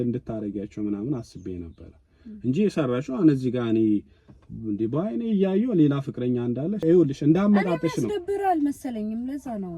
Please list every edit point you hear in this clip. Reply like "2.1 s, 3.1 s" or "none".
6.8 s